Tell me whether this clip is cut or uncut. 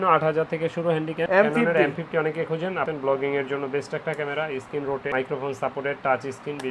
cut